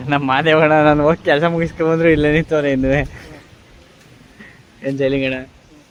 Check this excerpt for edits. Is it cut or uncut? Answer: uncut